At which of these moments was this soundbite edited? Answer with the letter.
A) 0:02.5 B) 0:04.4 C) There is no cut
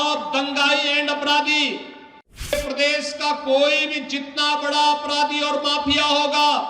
A